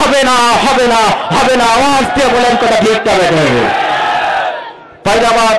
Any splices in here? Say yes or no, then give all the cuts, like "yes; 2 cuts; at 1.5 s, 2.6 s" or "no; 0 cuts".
no; 0 cuts